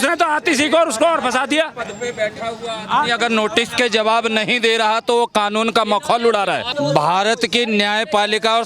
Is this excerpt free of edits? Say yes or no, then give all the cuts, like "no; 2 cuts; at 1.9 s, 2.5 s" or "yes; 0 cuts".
no; 1 cut; at 6.7 s